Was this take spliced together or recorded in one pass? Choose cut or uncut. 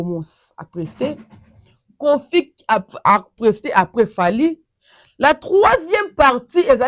uncut